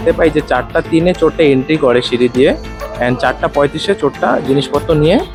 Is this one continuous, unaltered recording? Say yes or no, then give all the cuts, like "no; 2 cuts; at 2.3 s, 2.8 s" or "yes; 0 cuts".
yes; 0 cuts